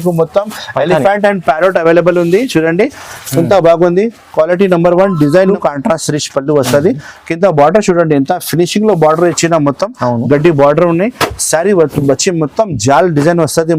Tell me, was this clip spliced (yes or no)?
yes